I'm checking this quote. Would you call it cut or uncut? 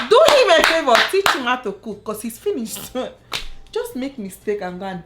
cut